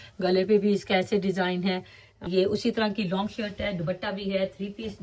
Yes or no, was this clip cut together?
yes